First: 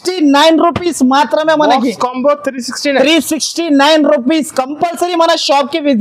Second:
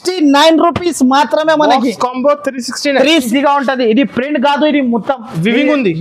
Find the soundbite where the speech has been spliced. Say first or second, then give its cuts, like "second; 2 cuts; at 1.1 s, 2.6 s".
second; 1 cut; at 3.3 s